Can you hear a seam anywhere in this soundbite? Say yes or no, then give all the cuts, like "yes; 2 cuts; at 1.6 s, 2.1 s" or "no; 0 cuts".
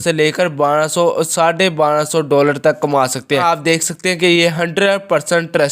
yes; 1 cut; at 3.4 s